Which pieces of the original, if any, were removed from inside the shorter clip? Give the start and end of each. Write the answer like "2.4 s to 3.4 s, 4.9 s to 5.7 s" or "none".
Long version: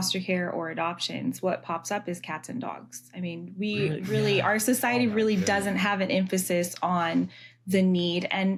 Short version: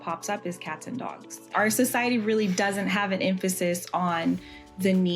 3.2 s to 4.4 s